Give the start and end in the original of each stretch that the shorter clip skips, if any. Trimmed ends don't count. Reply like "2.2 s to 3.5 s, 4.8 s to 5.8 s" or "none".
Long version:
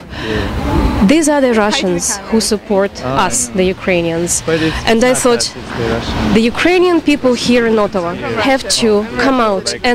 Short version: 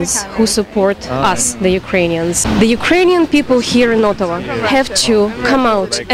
4.3 s to 6.1 s